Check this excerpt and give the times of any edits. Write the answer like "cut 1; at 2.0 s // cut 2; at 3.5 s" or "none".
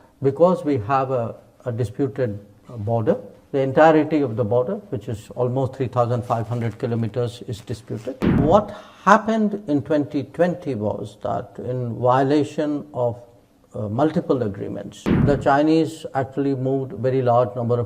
cut 1; at 8.4 s // cut 2; at 15.2 s